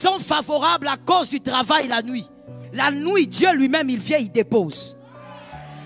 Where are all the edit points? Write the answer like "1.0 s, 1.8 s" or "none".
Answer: 2.6 s